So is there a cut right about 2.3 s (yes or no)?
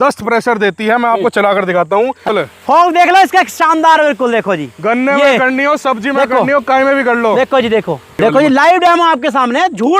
yes